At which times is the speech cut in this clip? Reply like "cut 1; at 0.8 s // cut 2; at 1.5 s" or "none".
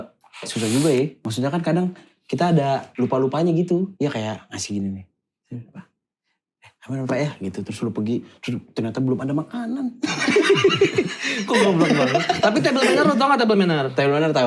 cut 1; at 1.2 s // cut 2; at 2.9 s // cut 3; at 3.9 s